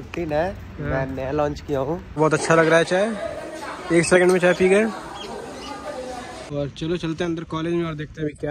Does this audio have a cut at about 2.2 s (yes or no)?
yes